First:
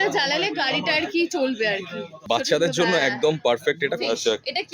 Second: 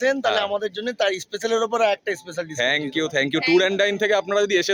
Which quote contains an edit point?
first; 2 cuts; at 2.2 s, 4.0 s

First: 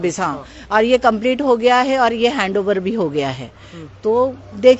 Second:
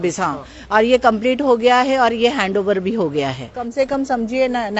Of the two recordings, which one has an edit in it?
second; 1 cut; at 3.6 s

